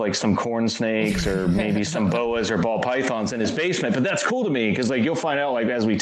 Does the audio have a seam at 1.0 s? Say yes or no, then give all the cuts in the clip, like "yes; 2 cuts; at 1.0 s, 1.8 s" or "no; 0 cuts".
no; 0 cuts